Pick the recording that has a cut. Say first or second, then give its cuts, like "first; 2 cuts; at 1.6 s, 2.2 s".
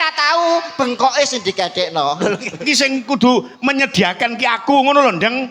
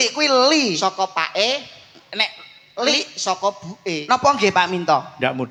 first; 1 cut; at 2.6 s